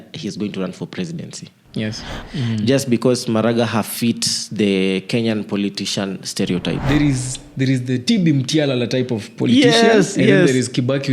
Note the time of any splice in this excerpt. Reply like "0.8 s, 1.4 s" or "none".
2.2 s, 6.8 s